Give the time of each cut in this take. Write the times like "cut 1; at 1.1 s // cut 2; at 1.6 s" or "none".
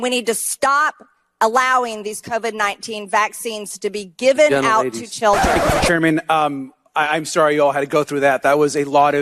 cut 1; at 5.6 s